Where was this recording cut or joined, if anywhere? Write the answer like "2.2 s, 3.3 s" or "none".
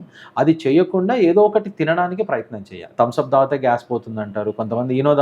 2.8 s